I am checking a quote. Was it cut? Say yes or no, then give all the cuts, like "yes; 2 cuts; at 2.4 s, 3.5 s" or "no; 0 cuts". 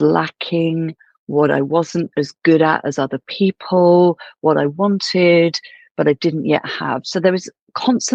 no; 0 cuts